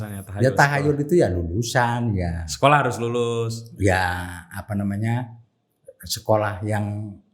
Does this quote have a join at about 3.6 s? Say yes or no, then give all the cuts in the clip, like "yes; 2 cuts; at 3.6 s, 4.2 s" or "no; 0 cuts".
no; 0 cuts